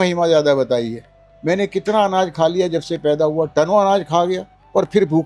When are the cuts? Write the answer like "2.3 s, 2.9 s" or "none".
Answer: none